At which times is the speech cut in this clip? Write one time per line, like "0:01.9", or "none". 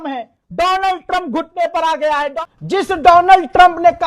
0:02.4